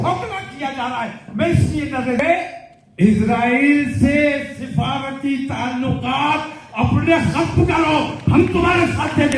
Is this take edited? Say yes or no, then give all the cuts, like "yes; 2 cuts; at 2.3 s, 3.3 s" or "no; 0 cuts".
yes; 1 cut; at 2.2 s